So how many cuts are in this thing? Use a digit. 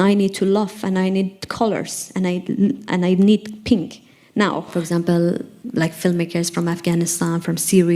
2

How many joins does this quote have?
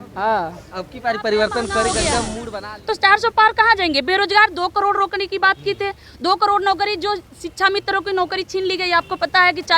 1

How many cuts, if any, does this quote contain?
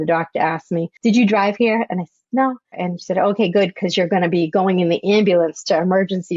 2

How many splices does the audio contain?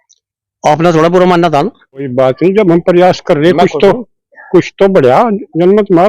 1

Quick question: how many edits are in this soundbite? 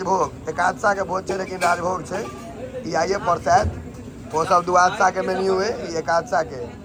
0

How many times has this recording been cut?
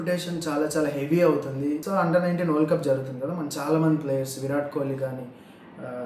1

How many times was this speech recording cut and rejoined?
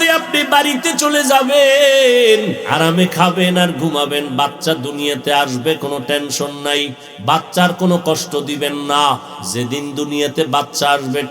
2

